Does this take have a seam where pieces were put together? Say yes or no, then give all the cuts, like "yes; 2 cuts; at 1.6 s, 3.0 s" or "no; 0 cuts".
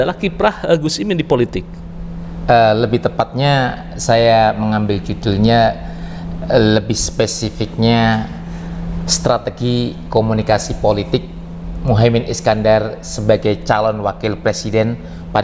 no; 0 cuts